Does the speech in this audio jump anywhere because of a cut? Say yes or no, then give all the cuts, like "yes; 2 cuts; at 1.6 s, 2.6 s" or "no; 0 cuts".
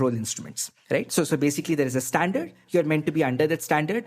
no; 0 cuts